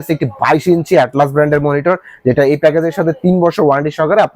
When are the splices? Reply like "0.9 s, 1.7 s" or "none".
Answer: none